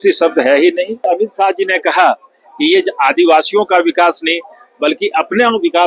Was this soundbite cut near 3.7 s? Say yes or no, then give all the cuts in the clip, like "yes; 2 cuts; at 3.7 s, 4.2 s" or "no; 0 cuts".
no; 1 cut; at 1.1 s